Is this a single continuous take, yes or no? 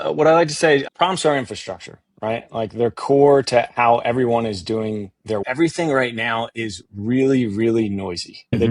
no